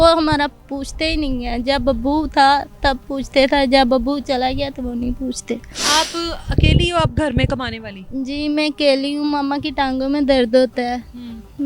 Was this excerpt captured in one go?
yes; 0 cuts

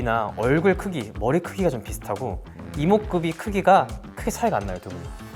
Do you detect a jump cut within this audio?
no; 0 cuts

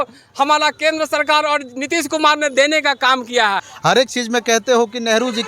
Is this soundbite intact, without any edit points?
no; 1 cut; at 3.7 s

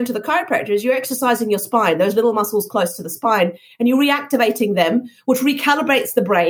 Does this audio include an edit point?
no; 0 cuts

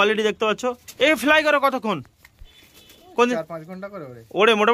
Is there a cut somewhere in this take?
no; 0 cuts

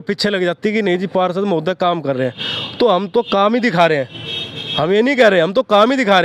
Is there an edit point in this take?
no; 0 cuts

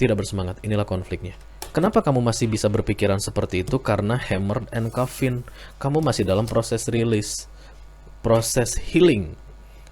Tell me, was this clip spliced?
yes; 1 cut; at 1.6 s

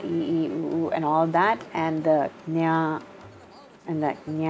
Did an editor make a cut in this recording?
no; 0 cuts

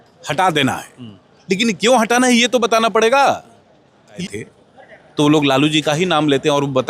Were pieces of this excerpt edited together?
yes; 1 cut; at 4.2 s

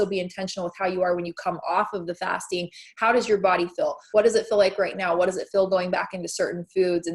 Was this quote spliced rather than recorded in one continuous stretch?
yes; 1 cut; at 4.0 s

